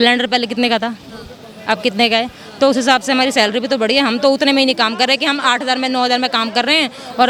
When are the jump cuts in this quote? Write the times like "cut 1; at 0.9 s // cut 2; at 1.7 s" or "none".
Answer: none